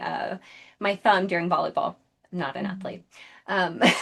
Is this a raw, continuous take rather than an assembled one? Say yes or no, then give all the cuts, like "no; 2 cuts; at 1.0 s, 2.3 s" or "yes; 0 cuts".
yes; 0 cuts